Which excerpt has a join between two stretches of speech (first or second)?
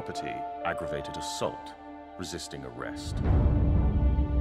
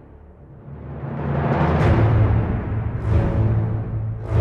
second